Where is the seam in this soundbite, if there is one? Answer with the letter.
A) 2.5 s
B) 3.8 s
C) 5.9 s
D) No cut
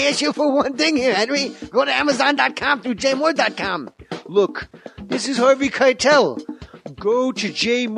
A